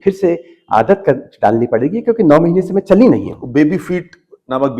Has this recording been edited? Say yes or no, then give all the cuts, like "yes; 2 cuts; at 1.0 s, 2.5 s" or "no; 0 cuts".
no; 0 cuts